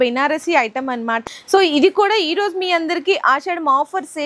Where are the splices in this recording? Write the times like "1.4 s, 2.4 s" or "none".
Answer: 1.2 s